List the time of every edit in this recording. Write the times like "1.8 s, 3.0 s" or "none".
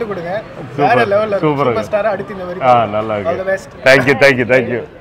none

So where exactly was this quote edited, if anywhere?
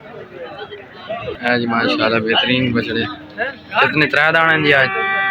1.4 s

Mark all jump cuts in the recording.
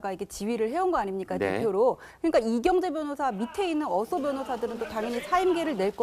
3.8 s

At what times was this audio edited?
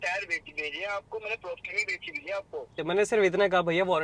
2.8 s

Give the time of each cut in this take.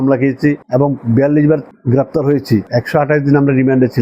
2.7 s

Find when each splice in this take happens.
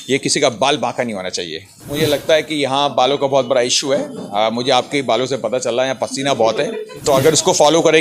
1.9 s, 6.9 s

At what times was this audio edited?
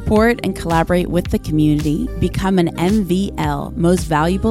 none

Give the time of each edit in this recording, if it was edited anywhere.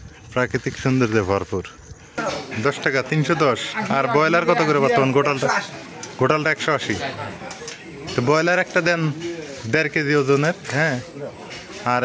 2.1 s

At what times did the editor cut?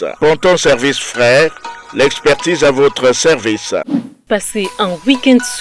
4.3 s

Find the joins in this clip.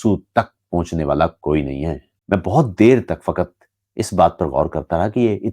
2.1 s

